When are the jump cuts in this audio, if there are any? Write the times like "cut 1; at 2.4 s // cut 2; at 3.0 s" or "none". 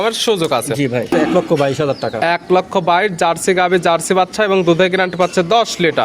cut 1; at 1.1 s